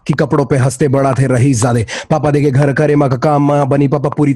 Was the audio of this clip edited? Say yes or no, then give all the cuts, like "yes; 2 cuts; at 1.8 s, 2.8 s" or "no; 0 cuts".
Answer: no; 0 cuts